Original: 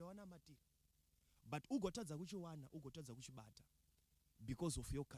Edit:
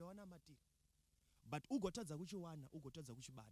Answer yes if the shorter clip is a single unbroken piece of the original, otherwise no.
yes